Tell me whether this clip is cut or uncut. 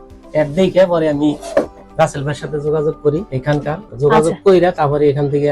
uncut